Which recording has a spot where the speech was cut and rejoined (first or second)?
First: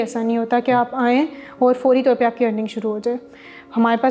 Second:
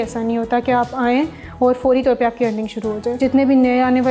second